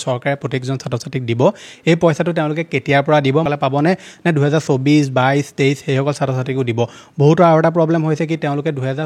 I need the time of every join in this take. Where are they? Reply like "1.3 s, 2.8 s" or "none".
3.5 s